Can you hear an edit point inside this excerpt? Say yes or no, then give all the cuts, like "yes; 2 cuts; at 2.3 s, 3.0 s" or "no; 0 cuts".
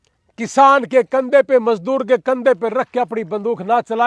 no; 0 cuts